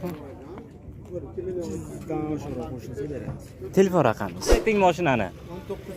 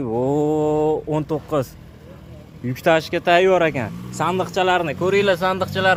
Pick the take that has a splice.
first; 1 cut; at 4.6 s

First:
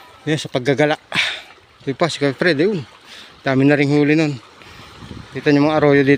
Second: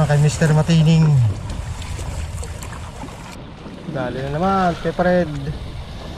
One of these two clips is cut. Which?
second; 1 cut; at 3.4 s

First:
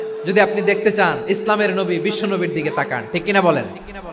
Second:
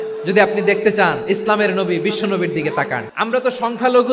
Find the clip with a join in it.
second; 1 cut; at 3.1 s

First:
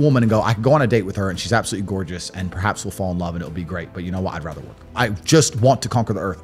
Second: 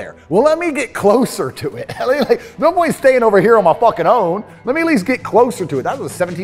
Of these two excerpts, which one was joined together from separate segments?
first; 1 cut; at 5.0 s

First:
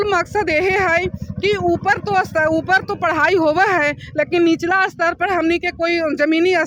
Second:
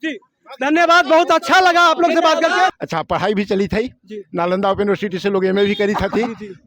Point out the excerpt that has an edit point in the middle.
second; 1 cut; at 2.8 s

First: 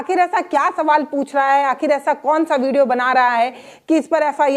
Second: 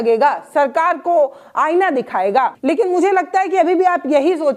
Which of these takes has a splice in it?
second; 1 cut; at 2.6 s

